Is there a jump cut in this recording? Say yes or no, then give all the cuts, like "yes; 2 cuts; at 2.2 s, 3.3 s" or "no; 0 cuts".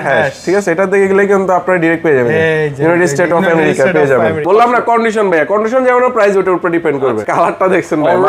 yes; 2 cuts; at 4.4 s, 7.3 s